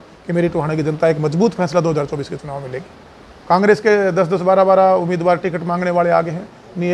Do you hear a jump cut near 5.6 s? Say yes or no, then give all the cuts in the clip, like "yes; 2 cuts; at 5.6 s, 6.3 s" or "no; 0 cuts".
no; 1 cut; at 3.3 s